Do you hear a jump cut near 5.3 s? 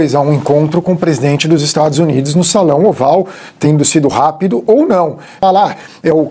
yes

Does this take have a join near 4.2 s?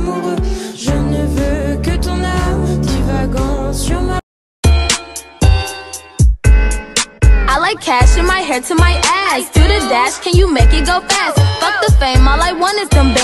yes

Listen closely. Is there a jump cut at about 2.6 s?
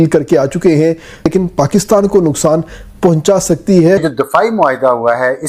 no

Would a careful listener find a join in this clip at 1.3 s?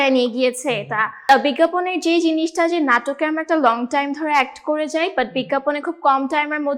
yes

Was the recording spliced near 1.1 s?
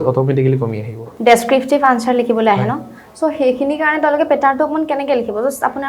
yes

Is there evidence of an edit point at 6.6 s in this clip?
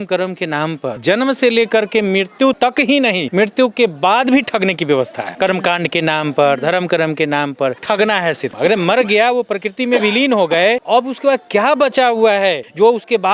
no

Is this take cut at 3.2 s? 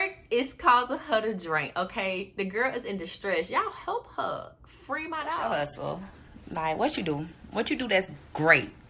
no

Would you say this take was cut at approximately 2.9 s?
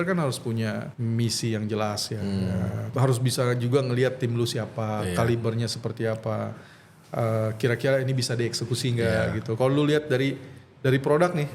yes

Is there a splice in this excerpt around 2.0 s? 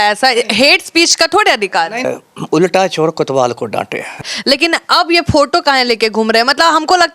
yes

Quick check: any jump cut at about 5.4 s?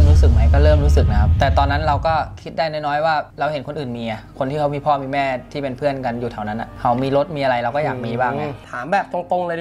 no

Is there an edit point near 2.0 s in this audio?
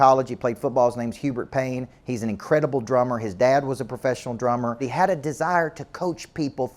no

